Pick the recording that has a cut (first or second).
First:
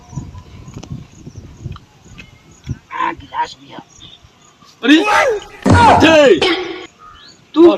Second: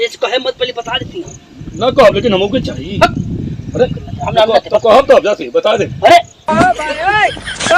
second